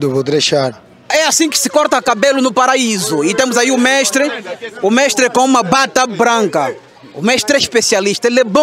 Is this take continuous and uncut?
no; 1 cut; at 1.0 s

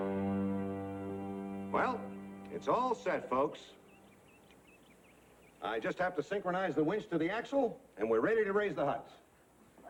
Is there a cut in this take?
no; 0 cuts

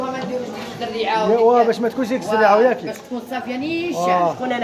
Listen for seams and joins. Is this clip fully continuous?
yes; 0 cuts

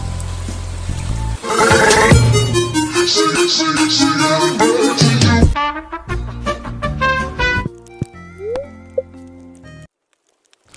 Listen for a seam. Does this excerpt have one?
no; 0 cuts

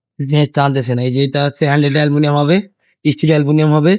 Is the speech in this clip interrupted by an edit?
no; 0 cuts

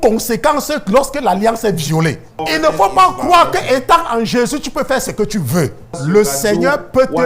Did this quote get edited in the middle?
yes; 2 cuts; at 2.3 s, 5.9 s

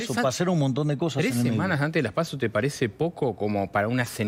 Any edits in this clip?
no; 0 cuts

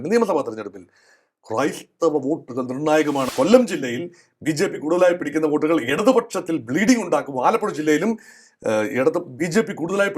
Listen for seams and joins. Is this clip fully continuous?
no; 1 cut; at 3.3 s

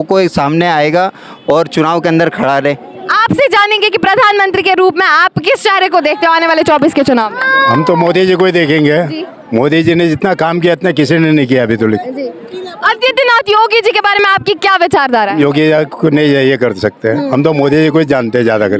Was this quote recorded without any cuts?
yes; 0 cuts

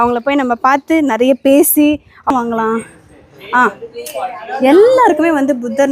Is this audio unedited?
no; 1 cut; at 2.3 s

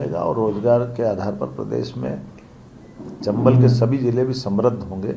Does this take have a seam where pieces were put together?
no; 0 cuts

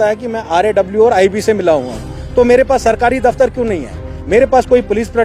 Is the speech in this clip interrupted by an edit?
no; 0 cuts

